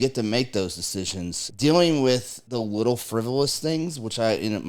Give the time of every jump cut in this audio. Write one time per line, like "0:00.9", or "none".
0:01.4
0:02.4